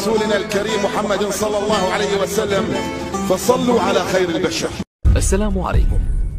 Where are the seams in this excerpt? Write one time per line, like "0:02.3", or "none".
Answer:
0:04.9